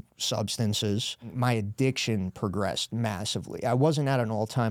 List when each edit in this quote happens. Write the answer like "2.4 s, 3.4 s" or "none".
1.3 s